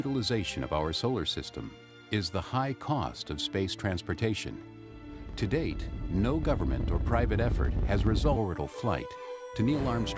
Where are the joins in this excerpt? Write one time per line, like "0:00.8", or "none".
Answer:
none